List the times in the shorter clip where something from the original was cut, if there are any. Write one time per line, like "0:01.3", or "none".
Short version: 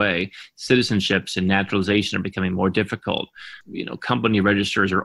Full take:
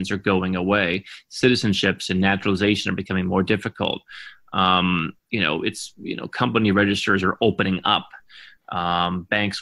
0:03.6